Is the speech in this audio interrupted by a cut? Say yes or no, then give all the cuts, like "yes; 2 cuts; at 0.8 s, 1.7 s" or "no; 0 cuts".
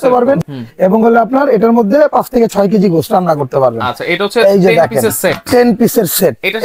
no; 0 cuts